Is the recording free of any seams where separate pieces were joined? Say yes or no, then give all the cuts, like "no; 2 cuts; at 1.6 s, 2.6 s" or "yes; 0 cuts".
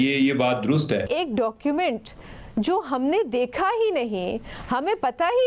no; 1 cut; at 1.1 s